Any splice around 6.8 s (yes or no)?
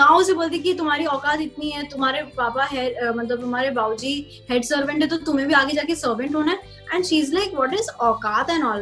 no